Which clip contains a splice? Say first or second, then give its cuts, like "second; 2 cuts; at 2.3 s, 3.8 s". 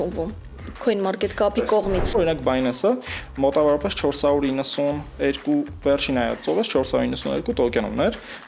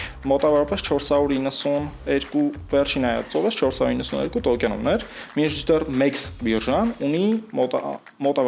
first; 1 cut; at 2.2 s